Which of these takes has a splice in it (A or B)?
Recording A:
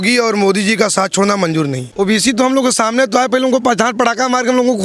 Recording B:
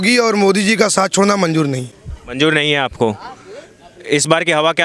A